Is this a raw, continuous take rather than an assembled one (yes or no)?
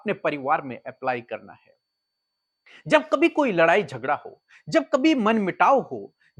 yes